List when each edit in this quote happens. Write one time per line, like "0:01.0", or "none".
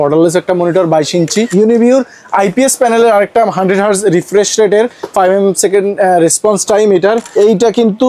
0:01.5
0:07.2